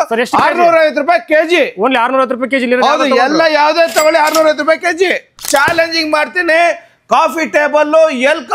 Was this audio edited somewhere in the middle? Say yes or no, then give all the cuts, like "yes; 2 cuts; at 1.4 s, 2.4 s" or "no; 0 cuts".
yes; 1 cut; at 5.4 s